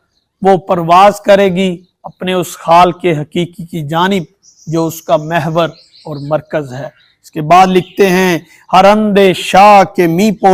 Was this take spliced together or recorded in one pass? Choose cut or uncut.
uncut